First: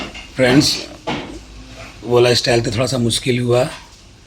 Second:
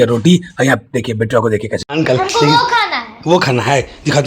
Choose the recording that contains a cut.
second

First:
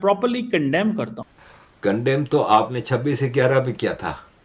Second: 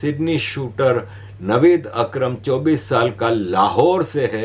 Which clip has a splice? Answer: first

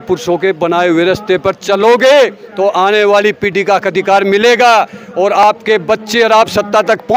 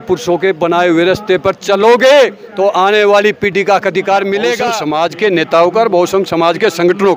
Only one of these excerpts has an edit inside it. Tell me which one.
second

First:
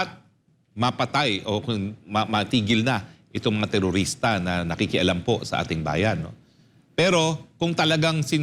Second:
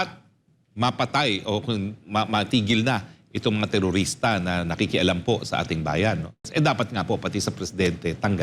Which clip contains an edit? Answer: second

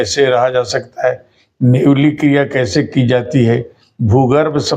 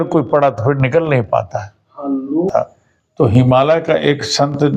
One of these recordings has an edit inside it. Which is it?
second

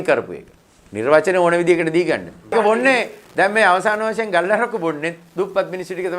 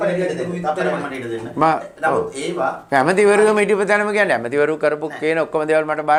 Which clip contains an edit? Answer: first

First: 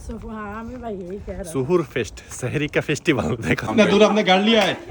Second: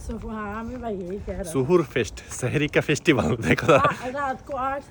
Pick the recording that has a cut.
first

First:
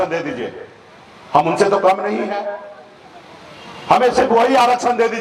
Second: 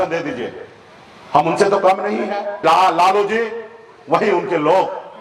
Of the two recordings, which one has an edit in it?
second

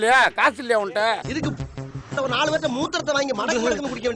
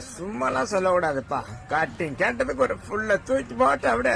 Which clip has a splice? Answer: first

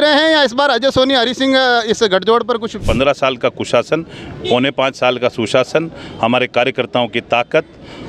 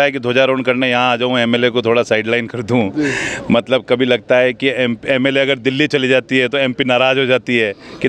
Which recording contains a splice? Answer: first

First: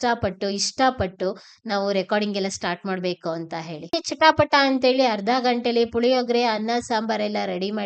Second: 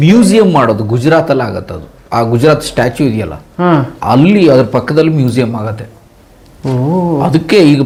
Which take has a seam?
first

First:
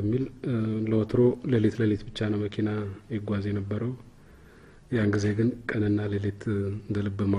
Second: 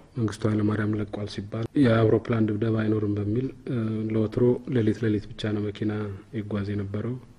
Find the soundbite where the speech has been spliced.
second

